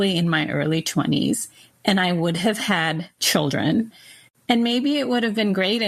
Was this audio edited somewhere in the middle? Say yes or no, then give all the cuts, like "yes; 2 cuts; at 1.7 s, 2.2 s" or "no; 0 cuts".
yes; 2 cuts; at 3.1 s, 3.9 s